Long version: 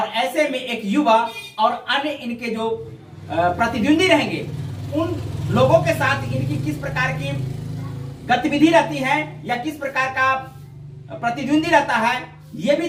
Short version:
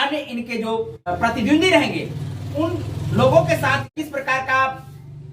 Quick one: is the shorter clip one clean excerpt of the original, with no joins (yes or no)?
no